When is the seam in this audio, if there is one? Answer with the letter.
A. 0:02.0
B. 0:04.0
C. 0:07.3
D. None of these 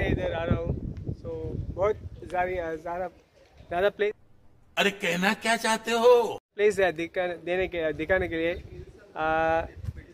D